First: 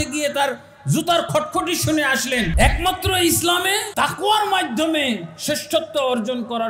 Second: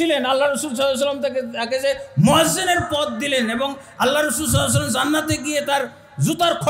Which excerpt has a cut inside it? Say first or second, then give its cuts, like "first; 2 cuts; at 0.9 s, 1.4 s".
first; 2 cuts; at 2.5 s, 3.9 s